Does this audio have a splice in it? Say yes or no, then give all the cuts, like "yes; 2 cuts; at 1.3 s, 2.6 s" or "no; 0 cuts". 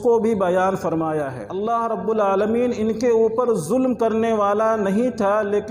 yes; 1 cut; at 1.4 s